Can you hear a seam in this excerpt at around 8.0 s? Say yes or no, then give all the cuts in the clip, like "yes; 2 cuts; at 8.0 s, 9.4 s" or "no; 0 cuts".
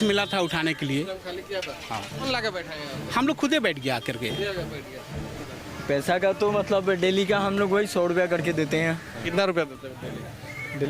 no; 3 cuts; at 2.3 s, 5.4 s, 9.2 s